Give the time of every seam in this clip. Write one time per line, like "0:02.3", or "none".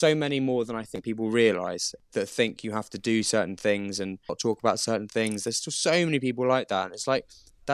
0:01.9
0:04.4